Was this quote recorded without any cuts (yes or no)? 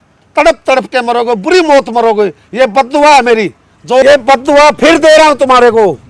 no